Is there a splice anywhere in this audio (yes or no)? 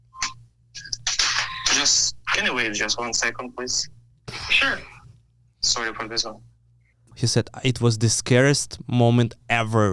yes